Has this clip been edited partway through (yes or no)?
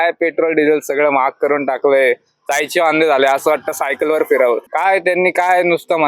yes